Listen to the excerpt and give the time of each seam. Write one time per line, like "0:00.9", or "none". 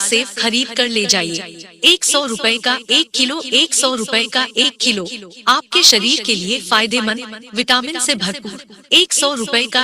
none